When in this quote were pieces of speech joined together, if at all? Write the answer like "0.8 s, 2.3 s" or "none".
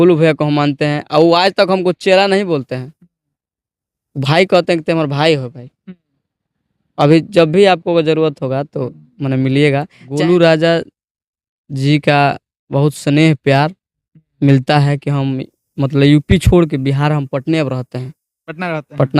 10.1 s